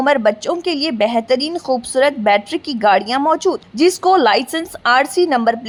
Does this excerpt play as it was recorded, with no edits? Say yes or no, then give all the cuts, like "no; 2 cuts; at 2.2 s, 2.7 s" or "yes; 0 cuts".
yes; 0 cuts